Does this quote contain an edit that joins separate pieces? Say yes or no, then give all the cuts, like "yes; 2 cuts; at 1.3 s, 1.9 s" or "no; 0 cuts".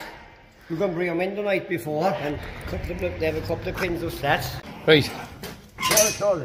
yes; 2 cuts; at 2.2 s, 4.5 s